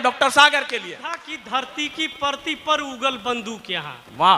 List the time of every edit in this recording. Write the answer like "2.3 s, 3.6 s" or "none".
1.3 s